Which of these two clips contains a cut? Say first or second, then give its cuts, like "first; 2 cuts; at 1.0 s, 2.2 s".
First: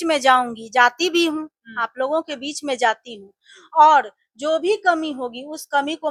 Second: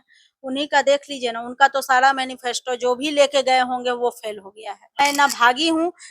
second; 1 cut; at 4.9 s